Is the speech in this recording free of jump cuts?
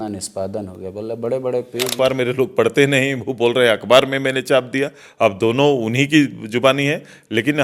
no; 1 cut; at 1.9 s

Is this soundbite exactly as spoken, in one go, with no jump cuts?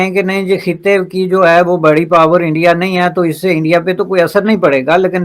yes; 0 cuts

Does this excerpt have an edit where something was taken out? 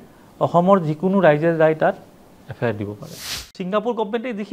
yes; 1 cut; at 3.4 s

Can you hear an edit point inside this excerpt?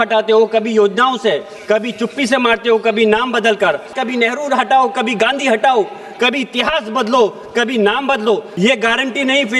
yes; 2 cuts; at 3.9 s, 8.5 s

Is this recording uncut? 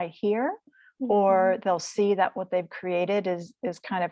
yes; 0 cuts

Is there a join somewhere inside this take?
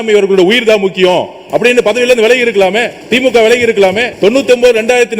yes; 2 cuts; at 3.0 s, 4.1 s

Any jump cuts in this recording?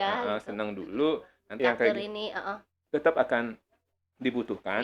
yes; 1 cut; at 1.6 s

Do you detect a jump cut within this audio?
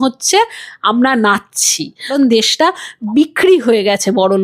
yes; 2 cuts; at 2.1 s, 3.0 s

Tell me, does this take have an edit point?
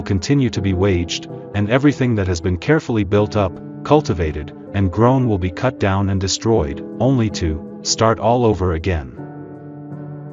yes; 1 cut; at 9.1 s

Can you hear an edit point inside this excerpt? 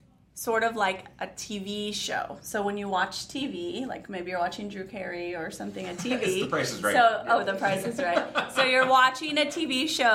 no; 0 cuts

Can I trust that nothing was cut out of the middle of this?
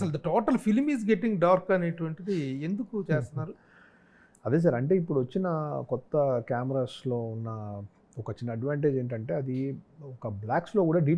yes; 0 cuts

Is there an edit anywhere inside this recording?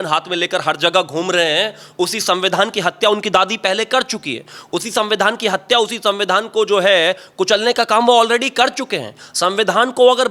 no; 0 cuts

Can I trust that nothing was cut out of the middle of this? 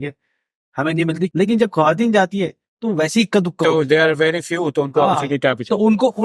no; 1 cut; at 1.3 s

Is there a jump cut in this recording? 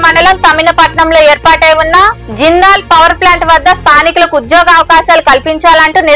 no; 0 cuts

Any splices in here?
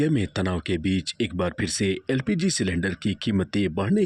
no; 0 cuts

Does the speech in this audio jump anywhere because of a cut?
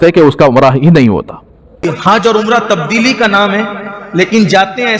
yes; 1 cut; at 1.8 s

